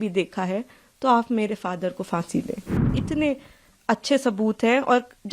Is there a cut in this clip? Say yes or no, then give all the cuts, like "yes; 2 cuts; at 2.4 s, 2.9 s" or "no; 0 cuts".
yes; 1 cut; at 2.9 s